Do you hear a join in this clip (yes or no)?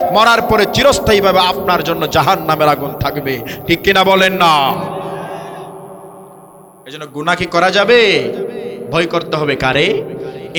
no